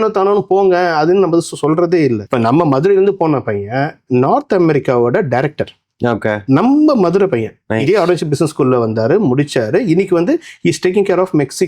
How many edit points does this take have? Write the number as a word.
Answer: three